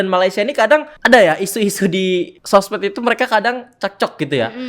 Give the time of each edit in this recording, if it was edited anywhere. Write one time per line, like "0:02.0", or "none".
0:00.9
0:02.4